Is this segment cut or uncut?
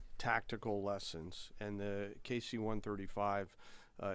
uncut